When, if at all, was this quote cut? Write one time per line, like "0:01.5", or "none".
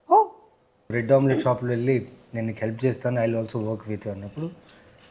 0:00.9